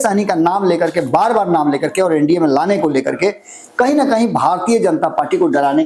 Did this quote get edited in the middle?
no; 0 cuts

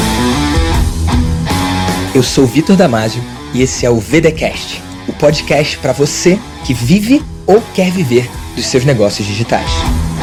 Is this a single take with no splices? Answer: yes; 0 cuts

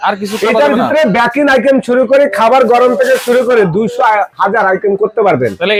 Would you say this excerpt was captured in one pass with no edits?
yes; 0 cuts

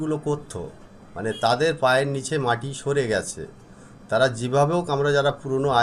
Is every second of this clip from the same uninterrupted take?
yes; 0 cuts

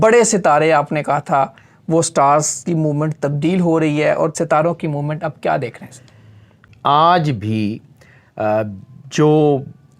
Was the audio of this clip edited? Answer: yes; 2 cuts; at 4.3 s, 6.7 s

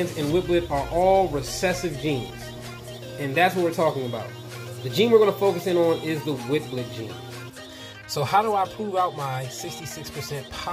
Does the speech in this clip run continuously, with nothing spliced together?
no; 2 cuts; at 4.6 s, 7.5 s

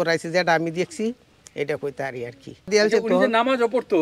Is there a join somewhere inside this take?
yes; 1 cut; at 2.7 s

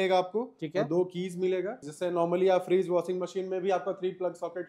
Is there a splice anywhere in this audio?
yes; 1 cut; at 1.8 s

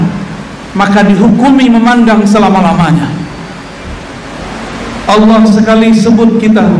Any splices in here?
no; 0 cuts

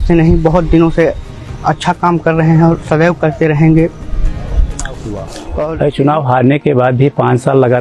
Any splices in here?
yes; 1 cut; at 5.4 s

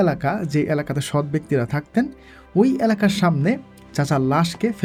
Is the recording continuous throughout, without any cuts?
yes; 0 cuts

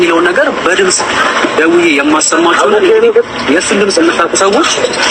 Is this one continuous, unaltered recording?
yes; 0 cuts

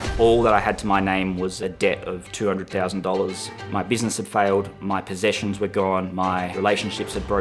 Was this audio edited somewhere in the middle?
yes; 4 cuts; at 1.6 s, 3.5 s, 4.8 s, 6.2 s

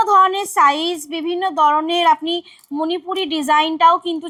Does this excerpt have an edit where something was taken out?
no; 0 cuts

